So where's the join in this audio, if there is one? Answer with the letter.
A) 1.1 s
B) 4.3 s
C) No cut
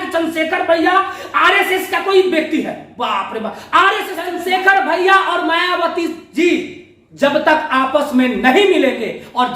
B